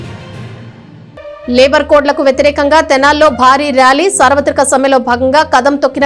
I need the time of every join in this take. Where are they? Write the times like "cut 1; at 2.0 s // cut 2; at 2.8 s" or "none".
cut 1; at 0.9 s